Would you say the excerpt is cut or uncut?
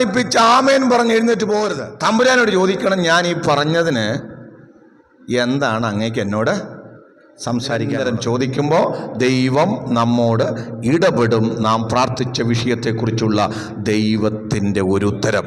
cut